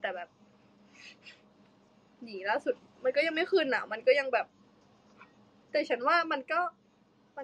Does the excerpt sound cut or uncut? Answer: uncut